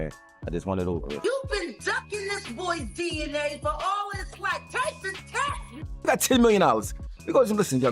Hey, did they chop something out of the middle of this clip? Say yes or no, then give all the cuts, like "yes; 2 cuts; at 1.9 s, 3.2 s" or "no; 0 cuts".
yes; 2 cuts; at 1.1 s, 6.1 s